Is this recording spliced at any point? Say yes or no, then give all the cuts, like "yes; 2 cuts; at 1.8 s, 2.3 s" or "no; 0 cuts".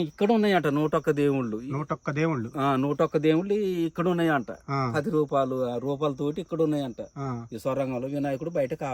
no; 0 cuts